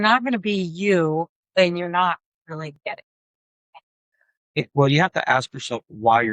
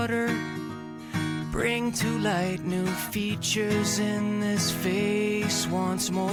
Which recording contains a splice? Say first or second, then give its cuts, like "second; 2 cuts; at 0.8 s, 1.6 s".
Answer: first; 1 cut; at 2.8 s